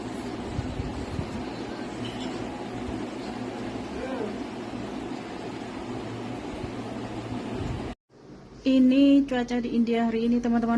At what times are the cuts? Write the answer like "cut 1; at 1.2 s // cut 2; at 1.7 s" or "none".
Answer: none